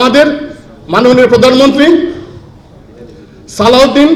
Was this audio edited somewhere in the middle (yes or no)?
no